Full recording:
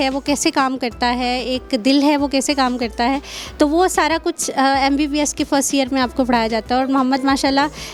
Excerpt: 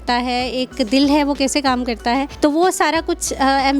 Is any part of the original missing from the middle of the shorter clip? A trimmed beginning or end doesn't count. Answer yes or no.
yes